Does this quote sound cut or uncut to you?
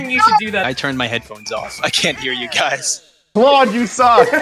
cut